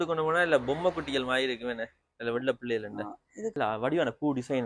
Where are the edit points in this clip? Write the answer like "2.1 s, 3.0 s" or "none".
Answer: 3.5 s